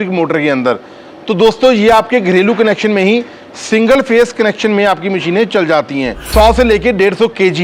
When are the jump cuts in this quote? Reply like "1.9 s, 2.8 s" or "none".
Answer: 6.2 s